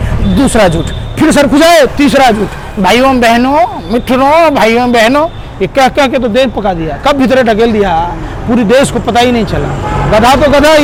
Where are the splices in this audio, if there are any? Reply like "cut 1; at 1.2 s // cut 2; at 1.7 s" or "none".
none